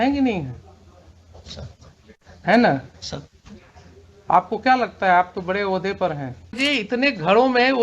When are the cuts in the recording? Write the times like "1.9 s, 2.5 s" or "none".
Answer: 6.6 s